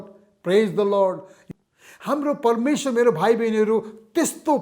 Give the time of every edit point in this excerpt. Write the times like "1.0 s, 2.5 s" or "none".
1.3 s